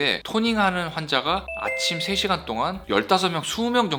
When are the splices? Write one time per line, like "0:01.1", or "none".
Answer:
none